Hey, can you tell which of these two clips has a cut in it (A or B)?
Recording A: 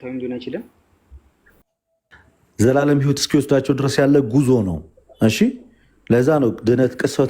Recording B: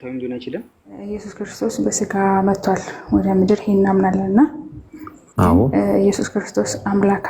B